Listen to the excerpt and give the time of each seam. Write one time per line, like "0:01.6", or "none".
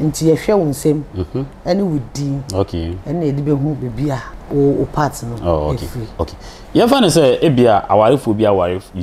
0:04.3